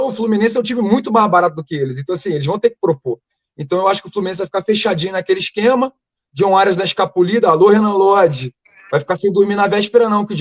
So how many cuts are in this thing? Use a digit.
0